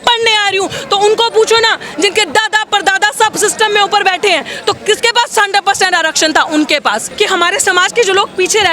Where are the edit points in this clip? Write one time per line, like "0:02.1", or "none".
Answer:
0:07.1